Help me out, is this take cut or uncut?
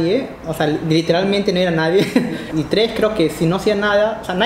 cut